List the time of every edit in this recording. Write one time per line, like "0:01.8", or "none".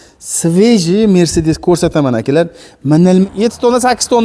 0:03.2